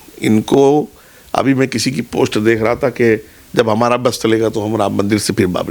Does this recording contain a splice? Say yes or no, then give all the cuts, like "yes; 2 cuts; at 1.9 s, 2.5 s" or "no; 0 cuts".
no; 0 cuts